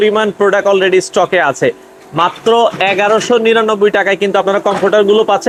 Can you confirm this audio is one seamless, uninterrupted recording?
yes; 0 cuts

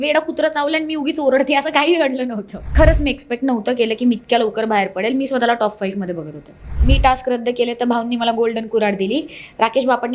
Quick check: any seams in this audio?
yes; 2 cuts; at 2.7 s, 6.7 s

